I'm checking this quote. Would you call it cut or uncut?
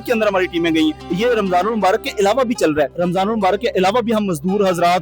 cut